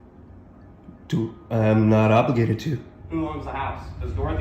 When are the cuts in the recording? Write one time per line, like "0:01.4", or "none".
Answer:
0:02.9